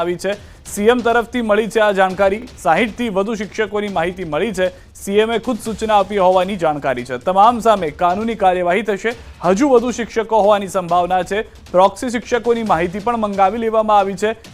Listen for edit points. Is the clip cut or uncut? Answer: uncut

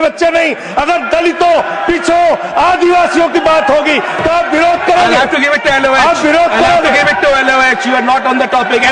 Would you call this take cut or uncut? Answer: uncut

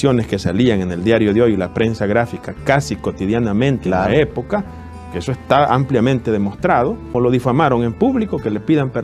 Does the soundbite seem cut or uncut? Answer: cut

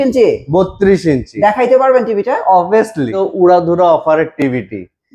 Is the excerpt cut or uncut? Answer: cut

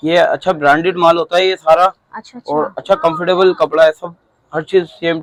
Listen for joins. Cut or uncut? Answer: uncut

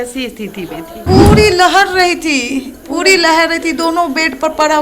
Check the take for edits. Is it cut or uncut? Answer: cut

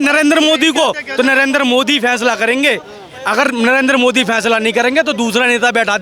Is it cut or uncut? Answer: uncut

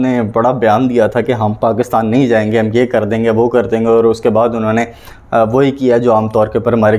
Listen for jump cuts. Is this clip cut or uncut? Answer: uncut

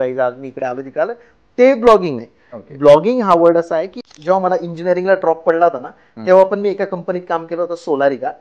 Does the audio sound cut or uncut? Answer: cut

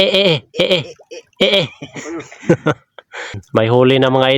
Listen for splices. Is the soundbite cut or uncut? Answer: cut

